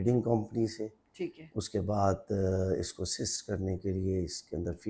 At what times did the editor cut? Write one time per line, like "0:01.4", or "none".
none